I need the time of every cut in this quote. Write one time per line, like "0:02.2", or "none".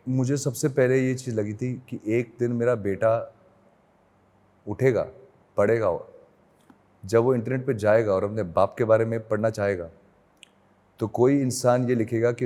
none